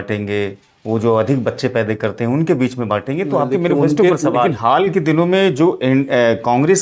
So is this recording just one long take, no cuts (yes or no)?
no